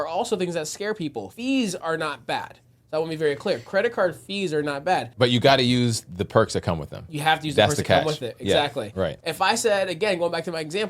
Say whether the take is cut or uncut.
cut